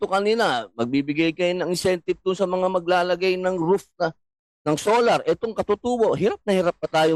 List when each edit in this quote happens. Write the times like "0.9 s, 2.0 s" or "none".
none

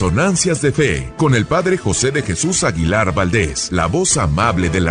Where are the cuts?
1.0 s, 3.6 s

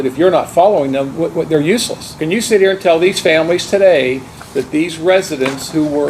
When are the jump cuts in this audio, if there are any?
2.0 s

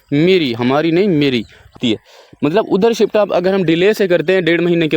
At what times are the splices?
1.8 s

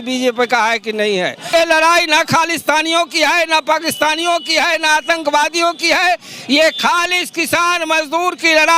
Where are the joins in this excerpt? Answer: 1.5 s

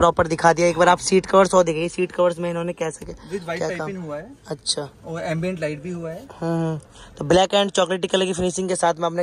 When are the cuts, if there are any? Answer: none

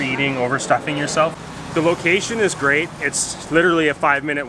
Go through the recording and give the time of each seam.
1.4 s

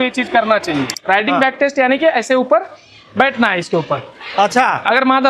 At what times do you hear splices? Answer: 0.9 s

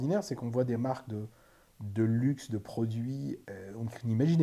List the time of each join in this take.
3.4 s

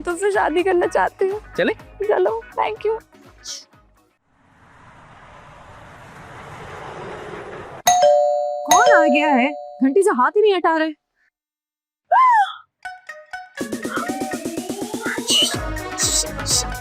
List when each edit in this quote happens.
none

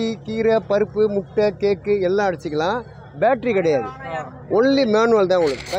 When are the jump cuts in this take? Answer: none

